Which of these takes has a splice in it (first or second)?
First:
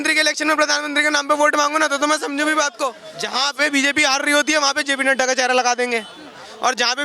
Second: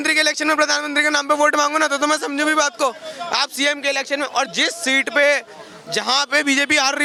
first